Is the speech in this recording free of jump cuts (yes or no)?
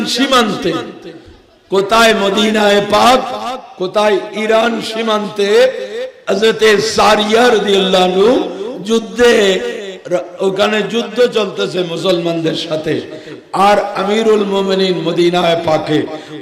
yes